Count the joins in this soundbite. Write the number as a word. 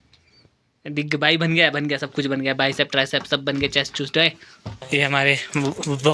one